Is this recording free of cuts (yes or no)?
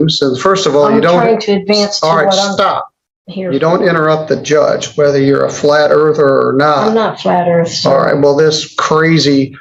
yes